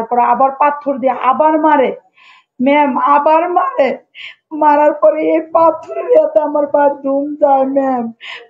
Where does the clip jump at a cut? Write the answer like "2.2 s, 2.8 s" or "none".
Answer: none